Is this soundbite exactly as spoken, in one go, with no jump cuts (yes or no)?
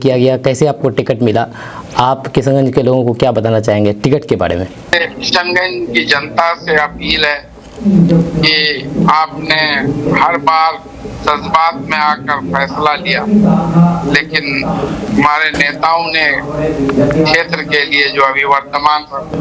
no